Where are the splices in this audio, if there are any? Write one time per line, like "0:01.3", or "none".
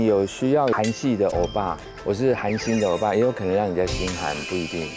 0:00.7
0:01.9